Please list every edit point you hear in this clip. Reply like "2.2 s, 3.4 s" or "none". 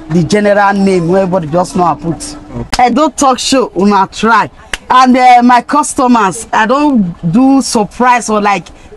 2.6 s

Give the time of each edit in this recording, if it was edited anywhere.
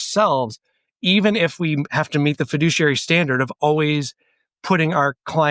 none

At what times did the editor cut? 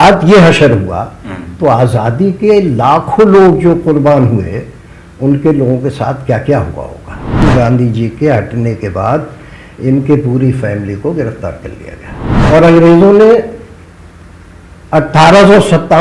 7.4 s, 12.3 s

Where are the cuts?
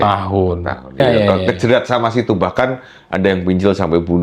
1.0 s

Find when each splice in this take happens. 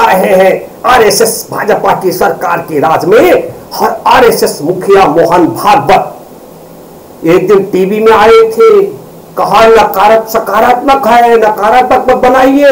none

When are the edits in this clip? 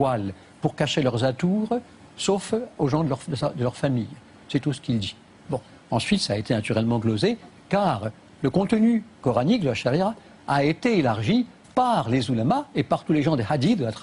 1.4 s

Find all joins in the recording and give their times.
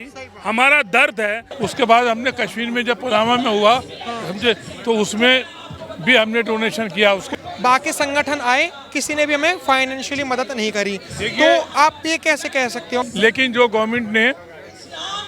1.5 s, 7.3 s, 13.0 s

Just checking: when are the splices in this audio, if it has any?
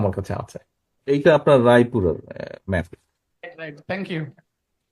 1.0 s

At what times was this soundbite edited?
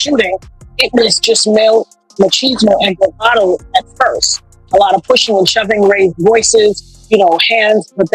none

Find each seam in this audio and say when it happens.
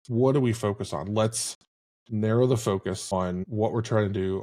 3.4 s

